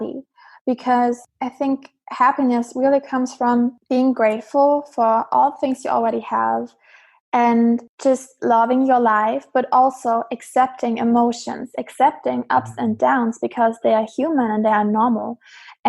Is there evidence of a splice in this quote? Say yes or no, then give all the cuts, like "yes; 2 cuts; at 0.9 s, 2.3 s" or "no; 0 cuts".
yes; 3 cuts; at 1.3 s, 3.8 s, 7.9 s